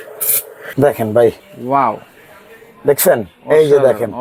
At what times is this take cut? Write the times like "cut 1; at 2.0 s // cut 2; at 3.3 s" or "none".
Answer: cut 1; at 0.7 s // cut 2; at 1.5 s